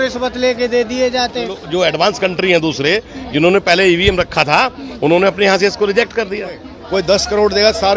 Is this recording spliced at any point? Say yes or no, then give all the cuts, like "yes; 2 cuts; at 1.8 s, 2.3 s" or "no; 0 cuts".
yes; 2 cuts; at 1.6 s, 6.7 s